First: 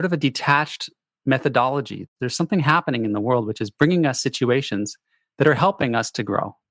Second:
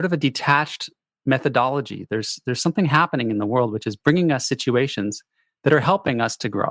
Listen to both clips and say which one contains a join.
first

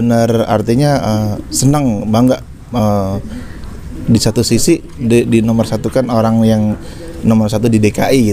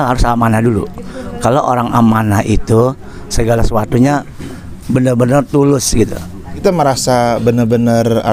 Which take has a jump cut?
second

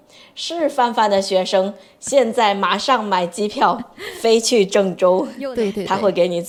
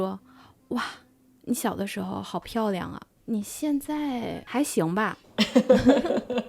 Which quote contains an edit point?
second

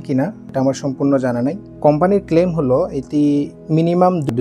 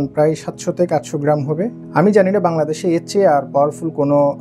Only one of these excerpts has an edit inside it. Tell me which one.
first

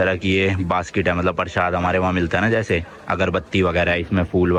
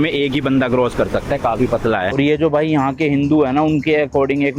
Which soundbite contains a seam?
second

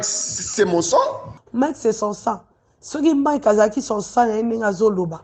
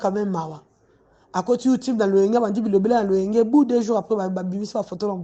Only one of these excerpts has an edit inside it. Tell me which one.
first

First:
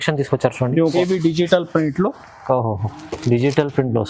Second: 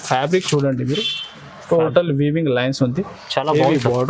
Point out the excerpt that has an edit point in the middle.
first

